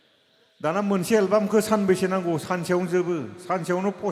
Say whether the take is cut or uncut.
uncut